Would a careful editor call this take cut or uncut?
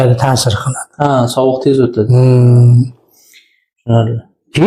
uncut